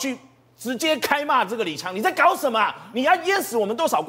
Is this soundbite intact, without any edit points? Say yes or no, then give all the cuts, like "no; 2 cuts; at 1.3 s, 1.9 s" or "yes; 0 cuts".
yes; 0 cuts